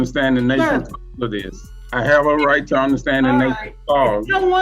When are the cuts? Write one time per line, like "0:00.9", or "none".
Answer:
0:01.6